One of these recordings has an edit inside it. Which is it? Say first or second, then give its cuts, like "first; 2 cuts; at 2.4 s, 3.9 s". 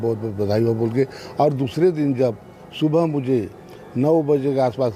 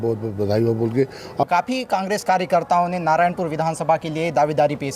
second; 1 cut; at 1.4 s